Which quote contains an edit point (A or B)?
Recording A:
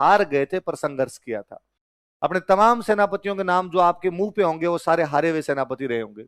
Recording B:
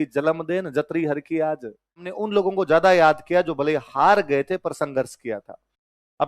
B